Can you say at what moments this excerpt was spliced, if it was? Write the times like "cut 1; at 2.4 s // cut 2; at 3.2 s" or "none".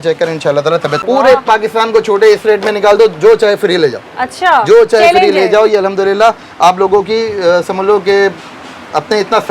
cut 1; at 1.0 s